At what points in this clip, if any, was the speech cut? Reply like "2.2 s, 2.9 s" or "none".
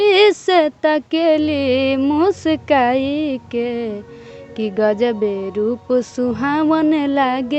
none